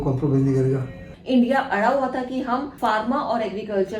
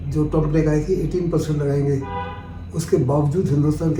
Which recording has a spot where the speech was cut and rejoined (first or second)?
first